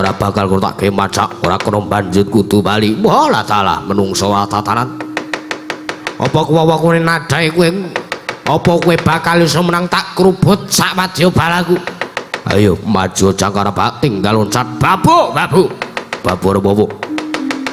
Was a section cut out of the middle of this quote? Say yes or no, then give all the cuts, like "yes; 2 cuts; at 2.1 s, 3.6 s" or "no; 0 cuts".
no; 0 cuts